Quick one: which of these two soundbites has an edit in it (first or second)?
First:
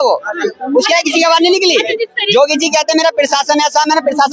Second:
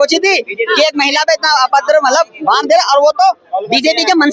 first